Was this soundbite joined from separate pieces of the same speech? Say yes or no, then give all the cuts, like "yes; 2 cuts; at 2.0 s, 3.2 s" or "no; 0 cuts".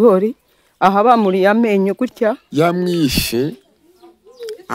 yes; 1 cut; at 2.4 s